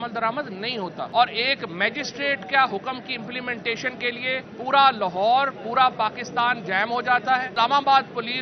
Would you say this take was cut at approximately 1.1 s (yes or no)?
yes